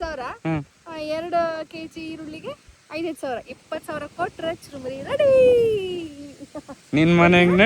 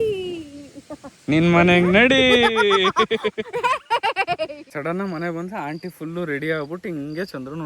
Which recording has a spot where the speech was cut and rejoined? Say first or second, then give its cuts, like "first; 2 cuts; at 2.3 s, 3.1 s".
second; 1 cut; at 4.7 s